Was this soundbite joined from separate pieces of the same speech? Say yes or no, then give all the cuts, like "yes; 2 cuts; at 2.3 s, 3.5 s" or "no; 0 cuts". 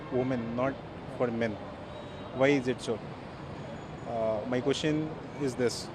no; 0 cuts